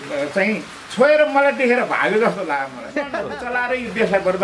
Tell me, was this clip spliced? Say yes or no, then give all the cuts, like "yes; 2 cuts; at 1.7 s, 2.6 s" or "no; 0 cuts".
yes; 1 cut; at 3.0 s